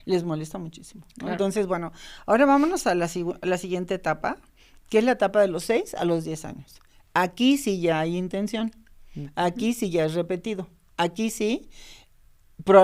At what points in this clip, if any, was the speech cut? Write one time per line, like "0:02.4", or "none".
none